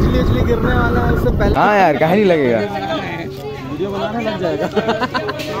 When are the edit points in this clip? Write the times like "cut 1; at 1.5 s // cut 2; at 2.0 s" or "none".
cut 1; at 1.5 s